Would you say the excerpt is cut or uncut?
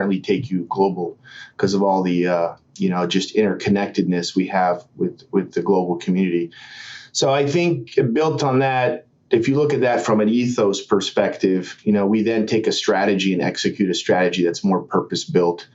uncut